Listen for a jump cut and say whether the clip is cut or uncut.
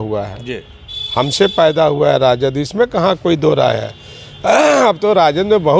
uncut